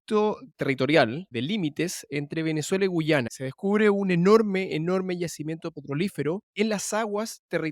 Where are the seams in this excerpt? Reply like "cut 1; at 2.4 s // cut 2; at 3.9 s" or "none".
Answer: cut 1; at 1.3 s // cut 2; at 3.3 s // cut 3; at 6.5 s